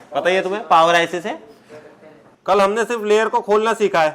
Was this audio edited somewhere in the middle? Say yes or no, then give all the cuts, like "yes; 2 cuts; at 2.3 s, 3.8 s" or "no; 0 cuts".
yes; 1 cut; at 2.3 s